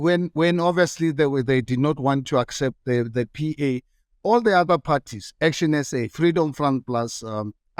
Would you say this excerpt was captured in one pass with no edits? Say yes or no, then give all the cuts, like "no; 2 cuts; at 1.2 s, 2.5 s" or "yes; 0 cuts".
yes; 0 cuts